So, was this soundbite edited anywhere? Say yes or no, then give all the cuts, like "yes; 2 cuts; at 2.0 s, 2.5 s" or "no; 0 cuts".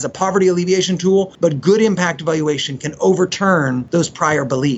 yes; 2 cuts; at 1.3 s, 3.8 s